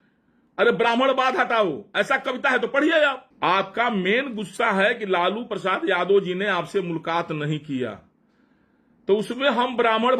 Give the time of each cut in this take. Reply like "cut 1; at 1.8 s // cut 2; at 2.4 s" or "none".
cut 1; at 3.2 s